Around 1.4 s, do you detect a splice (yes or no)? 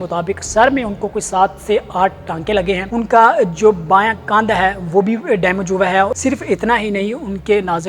no